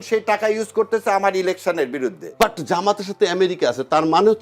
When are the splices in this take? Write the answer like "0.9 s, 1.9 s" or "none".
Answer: 2.2 s